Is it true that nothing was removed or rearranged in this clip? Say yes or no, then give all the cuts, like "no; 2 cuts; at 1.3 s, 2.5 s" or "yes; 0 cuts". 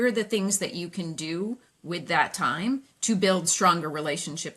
yes; 0 cuts